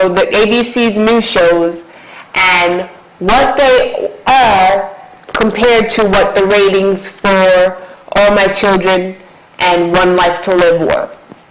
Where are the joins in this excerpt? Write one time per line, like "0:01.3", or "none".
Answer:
none

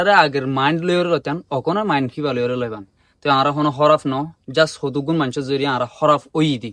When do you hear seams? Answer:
none

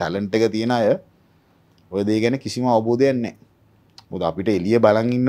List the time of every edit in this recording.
none

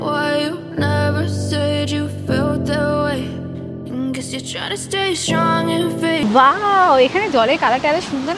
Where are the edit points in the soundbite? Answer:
none

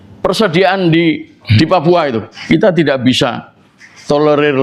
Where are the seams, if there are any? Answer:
0:02.3

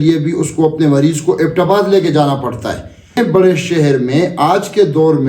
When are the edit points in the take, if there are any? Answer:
0:03.2

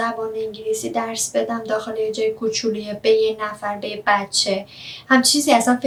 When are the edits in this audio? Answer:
none

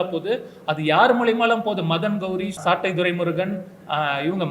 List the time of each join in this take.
0:02.6

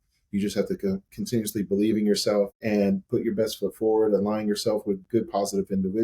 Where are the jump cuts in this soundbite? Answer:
0:02.6

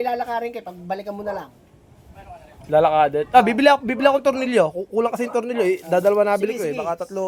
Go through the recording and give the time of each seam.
none

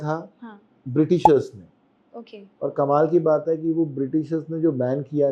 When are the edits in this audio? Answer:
none

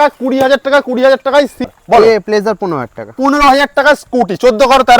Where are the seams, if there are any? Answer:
0:01.7

